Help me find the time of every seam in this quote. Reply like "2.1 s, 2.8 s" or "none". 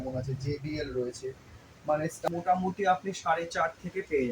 2.3 s